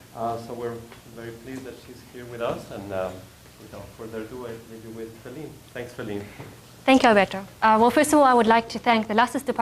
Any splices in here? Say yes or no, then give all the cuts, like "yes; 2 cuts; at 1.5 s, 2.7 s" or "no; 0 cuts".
yes; 1 cut; at 0.9 s